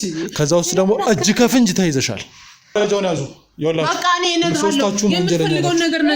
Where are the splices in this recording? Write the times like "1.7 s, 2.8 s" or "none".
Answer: 2.8 s